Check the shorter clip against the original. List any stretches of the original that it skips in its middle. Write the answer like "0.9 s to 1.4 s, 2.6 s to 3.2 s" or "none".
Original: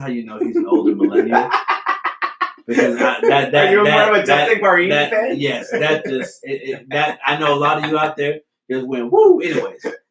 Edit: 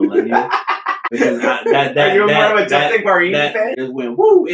2.0 s to 2.5 s, 5.3 s to 8.7 s